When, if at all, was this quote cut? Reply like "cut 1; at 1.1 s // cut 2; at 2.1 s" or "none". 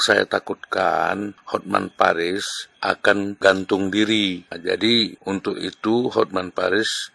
cut 1; at 1.4 s // cut 2; at 3.0 s // cut 3; at 4.5 s // cut 4; at 5.2 s